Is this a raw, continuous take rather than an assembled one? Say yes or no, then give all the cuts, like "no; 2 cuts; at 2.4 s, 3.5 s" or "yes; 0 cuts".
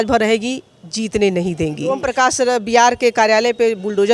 no; 1 cut; at 2.1 s